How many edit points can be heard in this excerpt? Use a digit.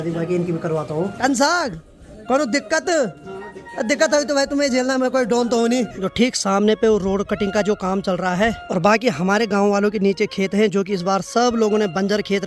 3